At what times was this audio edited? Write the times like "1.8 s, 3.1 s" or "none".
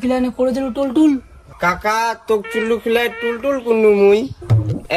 none